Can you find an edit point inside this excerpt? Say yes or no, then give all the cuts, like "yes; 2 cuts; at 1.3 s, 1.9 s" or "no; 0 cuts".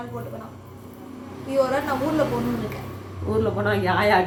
no; 0 cuts